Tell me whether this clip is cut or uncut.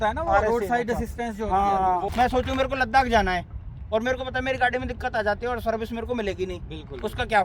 cut